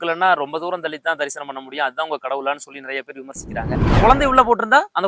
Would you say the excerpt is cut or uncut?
cut